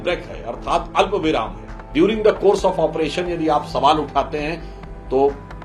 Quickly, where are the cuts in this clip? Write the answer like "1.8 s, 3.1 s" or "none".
1.9 s